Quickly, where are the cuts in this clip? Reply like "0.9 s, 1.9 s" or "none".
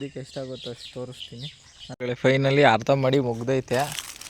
1.9 s